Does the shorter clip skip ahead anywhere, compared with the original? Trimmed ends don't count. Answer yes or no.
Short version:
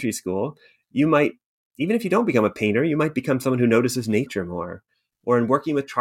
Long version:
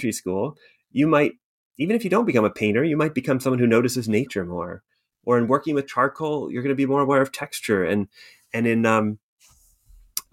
no